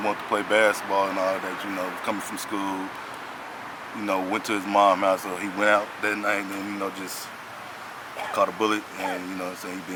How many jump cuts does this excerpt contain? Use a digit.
0